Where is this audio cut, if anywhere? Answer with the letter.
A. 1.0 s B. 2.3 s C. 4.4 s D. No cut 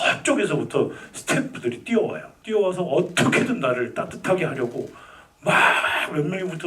B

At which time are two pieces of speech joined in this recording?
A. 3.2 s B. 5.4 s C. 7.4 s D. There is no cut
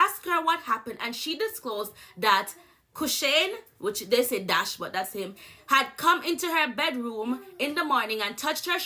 D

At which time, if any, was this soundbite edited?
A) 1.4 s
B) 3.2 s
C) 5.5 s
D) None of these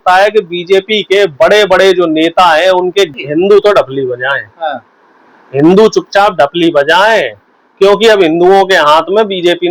B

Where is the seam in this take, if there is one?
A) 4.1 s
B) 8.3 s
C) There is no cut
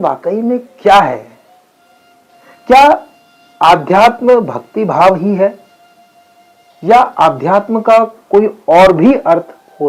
C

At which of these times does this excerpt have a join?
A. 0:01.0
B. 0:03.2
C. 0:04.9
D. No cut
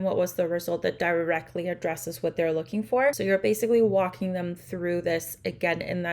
B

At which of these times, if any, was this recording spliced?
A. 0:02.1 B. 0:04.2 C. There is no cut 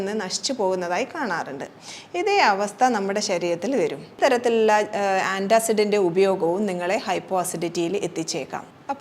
B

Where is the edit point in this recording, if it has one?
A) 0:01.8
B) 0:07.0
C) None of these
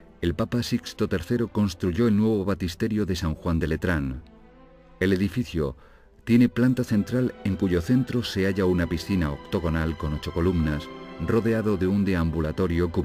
C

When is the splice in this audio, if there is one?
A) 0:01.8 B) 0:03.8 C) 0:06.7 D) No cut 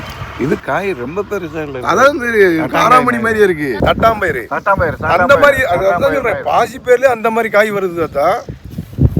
B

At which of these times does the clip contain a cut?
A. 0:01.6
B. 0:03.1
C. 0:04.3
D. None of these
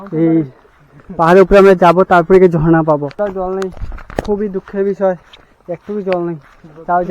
B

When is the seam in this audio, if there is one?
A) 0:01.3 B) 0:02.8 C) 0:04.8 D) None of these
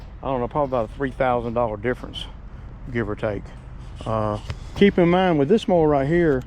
C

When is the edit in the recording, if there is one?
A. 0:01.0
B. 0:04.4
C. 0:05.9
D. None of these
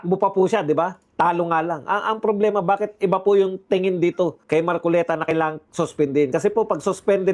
B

